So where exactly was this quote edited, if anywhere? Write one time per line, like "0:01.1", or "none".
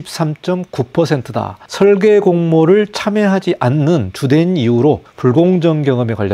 0:01.6
0:05.1